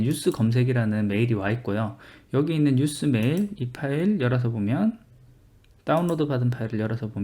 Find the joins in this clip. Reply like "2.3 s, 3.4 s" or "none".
5.5 s

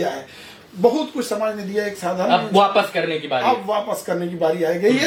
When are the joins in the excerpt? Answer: none

